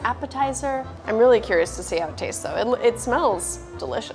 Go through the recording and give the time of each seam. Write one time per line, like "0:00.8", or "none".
0:00.9